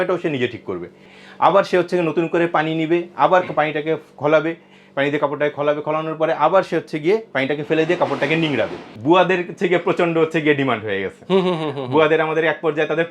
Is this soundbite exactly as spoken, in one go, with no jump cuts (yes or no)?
no